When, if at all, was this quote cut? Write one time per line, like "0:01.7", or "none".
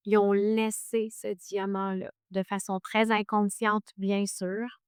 none